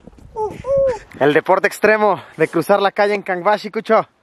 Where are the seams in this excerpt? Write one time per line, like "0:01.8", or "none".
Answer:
0:01.1